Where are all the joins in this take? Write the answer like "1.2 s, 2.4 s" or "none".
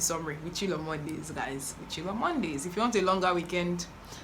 none